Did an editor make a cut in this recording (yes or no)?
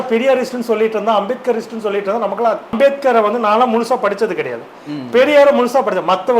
yes